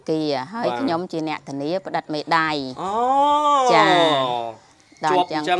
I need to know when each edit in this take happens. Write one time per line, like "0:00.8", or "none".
none